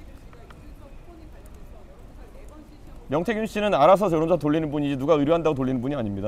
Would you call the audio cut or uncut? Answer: uncut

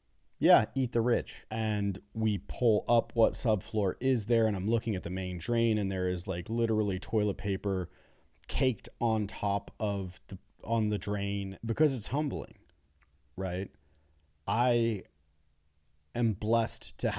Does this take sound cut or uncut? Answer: cut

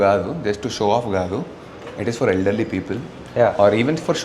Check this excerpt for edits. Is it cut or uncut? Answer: uncut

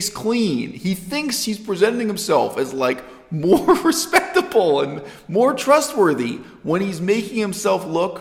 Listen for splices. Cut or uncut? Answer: uncut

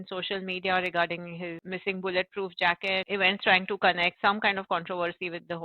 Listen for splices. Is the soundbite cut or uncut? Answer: cut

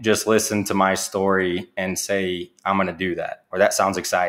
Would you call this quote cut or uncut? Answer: uncut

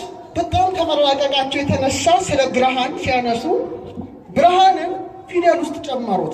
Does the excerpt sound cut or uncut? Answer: uncut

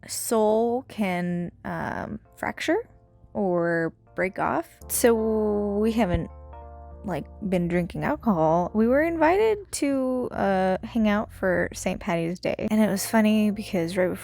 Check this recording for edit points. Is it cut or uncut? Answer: cut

